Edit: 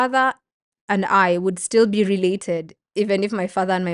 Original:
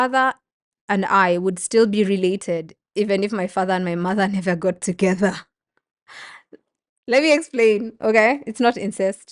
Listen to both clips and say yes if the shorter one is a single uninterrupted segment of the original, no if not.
yes